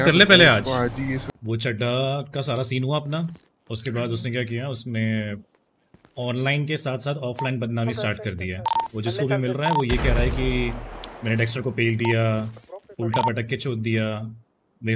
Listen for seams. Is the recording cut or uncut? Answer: cut